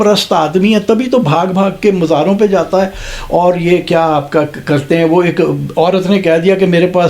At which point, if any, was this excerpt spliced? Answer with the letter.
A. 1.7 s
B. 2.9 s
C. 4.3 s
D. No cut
D